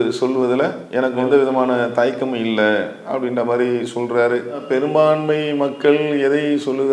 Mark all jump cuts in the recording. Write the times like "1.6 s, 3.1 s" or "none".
1.2 s

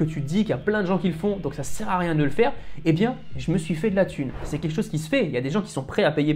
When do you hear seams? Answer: 4.4 s

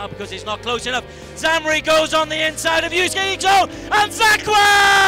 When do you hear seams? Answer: none

